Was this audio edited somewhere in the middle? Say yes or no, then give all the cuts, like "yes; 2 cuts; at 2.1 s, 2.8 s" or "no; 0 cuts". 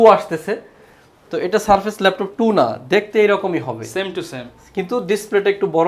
no; 0 cuts